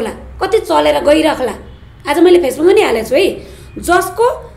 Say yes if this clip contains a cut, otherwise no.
no